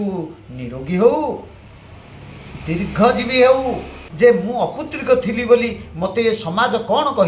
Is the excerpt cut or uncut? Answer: cut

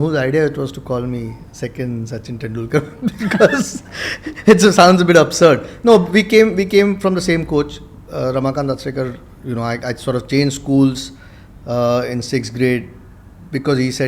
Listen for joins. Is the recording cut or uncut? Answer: uncut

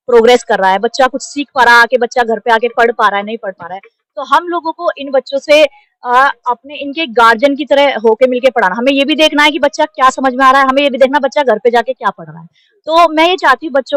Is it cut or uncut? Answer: uncut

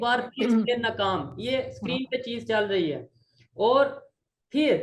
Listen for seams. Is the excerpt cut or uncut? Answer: uncut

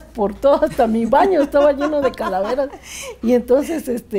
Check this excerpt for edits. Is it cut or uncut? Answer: uncut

